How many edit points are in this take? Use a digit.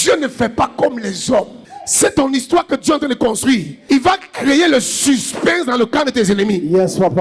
1